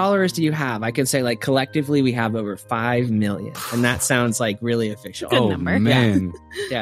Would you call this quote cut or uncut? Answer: uncut